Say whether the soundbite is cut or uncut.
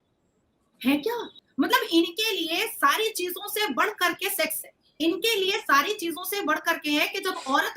cut